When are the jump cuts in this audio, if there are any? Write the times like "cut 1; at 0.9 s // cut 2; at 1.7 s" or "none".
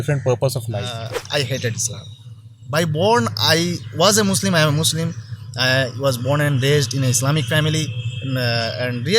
cut 1; at 1.1 s